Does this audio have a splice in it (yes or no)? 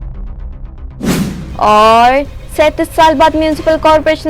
yes